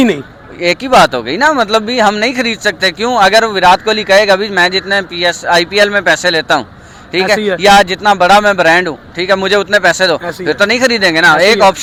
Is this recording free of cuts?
yes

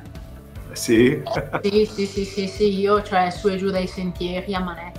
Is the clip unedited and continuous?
yes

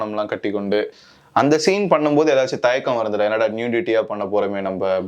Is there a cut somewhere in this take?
no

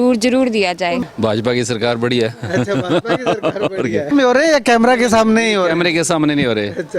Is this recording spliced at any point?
yes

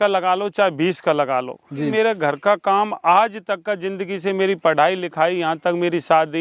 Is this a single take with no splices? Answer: no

